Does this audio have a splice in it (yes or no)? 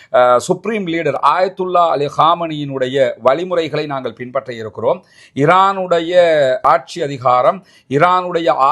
no